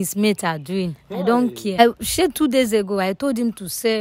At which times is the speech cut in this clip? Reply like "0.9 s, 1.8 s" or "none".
1.8 s